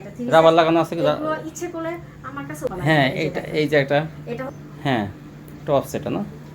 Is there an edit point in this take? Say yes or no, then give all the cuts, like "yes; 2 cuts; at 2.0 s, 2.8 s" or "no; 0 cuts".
yes; 1 cut; at 2.7 s